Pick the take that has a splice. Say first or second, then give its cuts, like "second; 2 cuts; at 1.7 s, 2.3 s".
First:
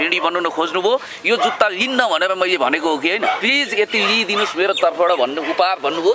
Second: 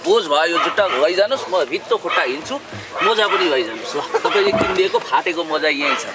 first; 1 cut; at 3.4 s